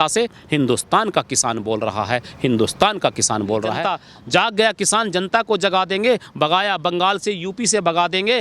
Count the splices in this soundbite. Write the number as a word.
one